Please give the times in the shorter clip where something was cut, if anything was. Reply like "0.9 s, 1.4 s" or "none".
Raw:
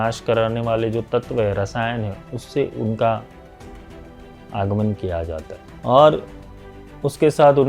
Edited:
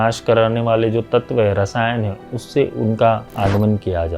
3.3 s